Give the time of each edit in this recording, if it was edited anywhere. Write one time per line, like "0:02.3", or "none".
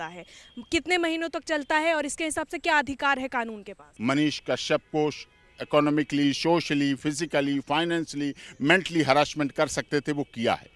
0:03.9